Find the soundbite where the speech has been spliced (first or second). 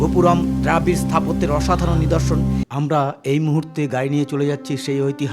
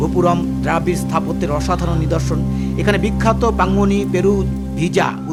first